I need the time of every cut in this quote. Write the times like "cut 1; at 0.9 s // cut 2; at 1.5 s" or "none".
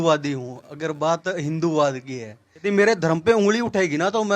cut 1; at 2.6 s

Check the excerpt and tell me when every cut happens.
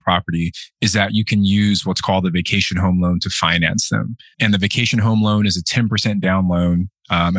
cut 1; at 4.4 s

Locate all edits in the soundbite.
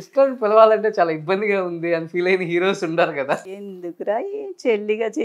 cut 1; at 3.4 s

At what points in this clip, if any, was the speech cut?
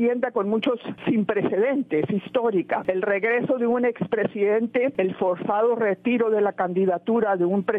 cut 1; at 0.9 s // cut 2; at 2.8 s // cut 3; at 4.9 s

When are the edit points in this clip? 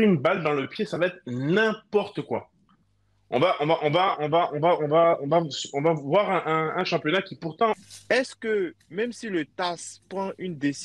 cut 1; at 7.8 s

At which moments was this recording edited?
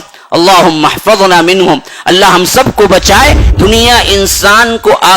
cut 1; at 3.4 s

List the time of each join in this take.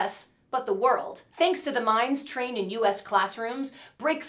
cut 1; at 1.2 s

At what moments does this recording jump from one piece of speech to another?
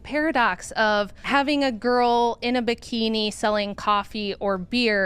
cut 1; at 1.2 s

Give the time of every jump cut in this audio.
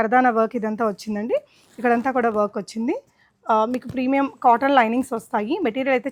none

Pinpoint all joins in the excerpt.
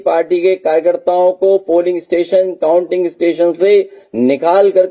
none

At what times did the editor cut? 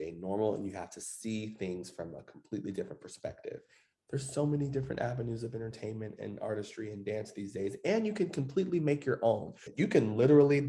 cut 1; at 3.9 s // cut 2; at 9.6 s

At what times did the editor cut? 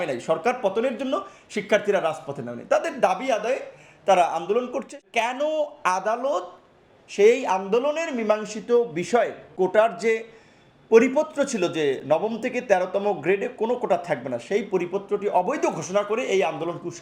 cut 1; at 5.0 s // cut 2; at 9.4 s

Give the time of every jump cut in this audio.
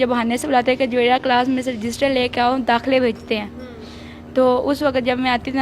none

